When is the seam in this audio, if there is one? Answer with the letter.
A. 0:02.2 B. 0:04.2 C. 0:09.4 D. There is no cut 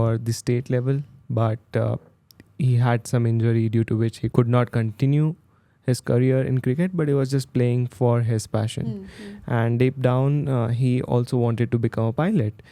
B